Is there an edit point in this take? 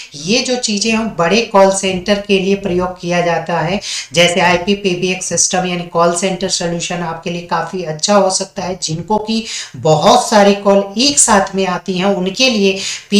no; 0 cuts

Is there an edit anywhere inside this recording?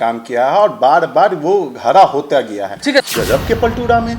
yes; 1 cut; at 3.0 s

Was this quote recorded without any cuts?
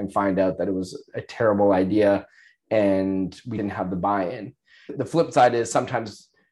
no; 1 cut; at 4.9 s

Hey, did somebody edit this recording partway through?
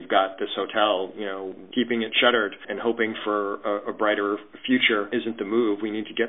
yes; 2 cuts; at 2.7 s, 5.1 s

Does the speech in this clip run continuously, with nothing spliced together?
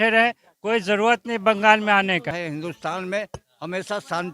no; 1 cut; at 2.4 s

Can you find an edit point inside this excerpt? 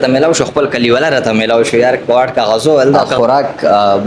yes; 1 cut; at 3.1 s

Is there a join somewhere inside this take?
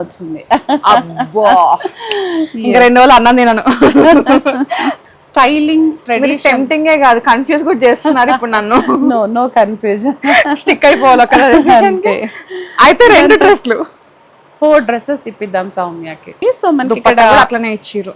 yes; 2 cuts; at 5.0 s, 16.3 s

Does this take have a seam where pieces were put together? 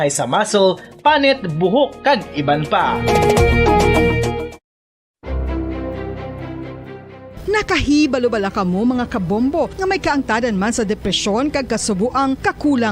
yes; 1 cut; at 5.1 s

